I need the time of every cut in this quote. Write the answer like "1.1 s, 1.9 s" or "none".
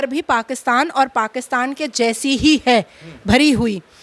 none